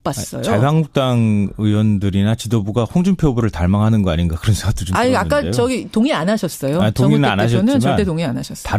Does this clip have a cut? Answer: yes; 1 cut; at 5.8 s

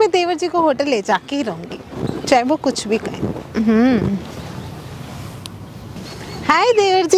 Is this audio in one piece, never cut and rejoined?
no; 1 cut; at 6.0 s

